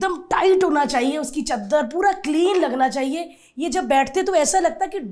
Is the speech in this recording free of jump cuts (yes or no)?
yes